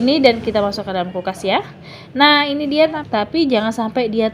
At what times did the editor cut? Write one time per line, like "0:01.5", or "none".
0:03.0